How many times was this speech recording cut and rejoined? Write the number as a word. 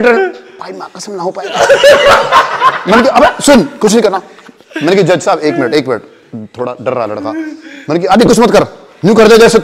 zero